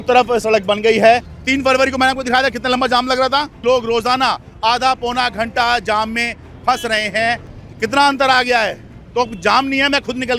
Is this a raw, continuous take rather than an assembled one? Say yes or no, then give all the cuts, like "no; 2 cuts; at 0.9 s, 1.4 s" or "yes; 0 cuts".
no; 3 cuts; at 1.3 s, 3.6 s, 7.6 s